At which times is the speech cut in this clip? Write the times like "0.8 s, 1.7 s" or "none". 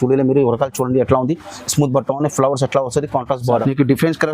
3.4 s